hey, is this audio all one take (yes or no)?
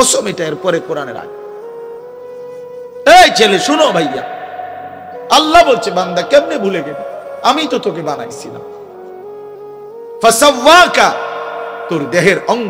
no